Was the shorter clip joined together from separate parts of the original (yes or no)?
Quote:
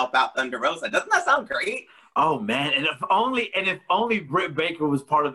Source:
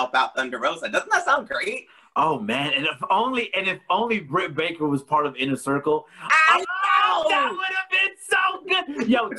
no